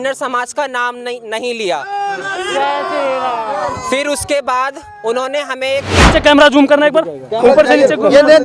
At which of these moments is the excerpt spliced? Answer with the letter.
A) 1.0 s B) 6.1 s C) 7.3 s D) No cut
B